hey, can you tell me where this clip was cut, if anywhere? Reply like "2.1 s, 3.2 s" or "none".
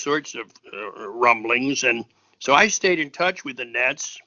none